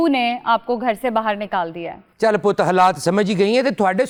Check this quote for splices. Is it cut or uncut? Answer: uncut